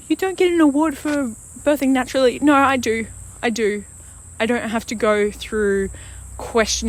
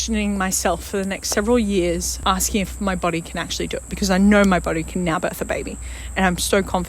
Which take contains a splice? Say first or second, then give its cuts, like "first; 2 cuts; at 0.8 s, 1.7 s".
second; 1 cut; at 2.1 s